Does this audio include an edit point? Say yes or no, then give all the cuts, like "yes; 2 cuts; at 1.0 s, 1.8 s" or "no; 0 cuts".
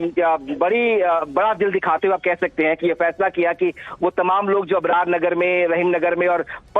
yes; 1 cut; at 4.7 s